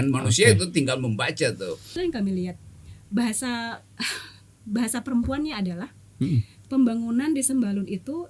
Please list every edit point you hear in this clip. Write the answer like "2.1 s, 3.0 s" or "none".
2.0 s